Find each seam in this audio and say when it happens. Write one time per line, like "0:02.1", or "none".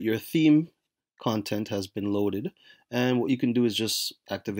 none

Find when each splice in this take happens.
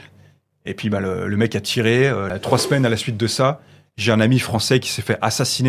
0:02.3

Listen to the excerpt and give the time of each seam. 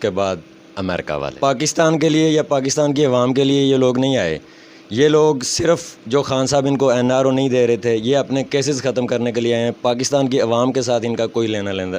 0:01.2

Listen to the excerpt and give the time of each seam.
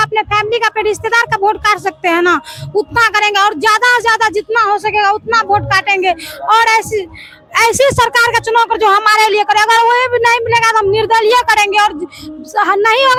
none

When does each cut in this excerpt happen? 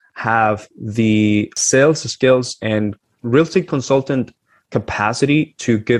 0:01.6
0:03.0

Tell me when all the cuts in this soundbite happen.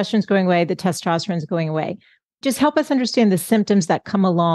0:02.4

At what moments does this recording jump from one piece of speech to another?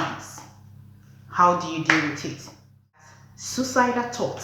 0:03.0

